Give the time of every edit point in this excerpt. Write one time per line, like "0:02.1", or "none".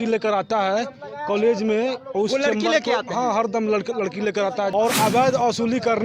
0:04.7